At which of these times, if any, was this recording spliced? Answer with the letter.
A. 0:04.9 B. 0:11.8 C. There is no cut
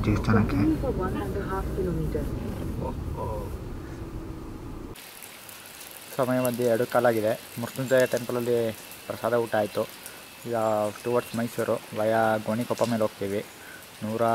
A